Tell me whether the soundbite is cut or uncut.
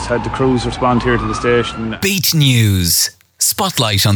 cut